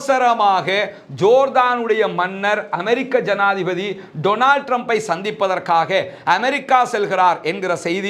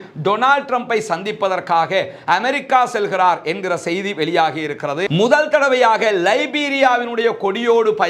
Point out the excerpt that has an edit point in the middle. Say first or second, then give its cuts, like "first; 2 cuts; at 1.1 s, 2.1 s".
second; 1 cut; at 5.0 s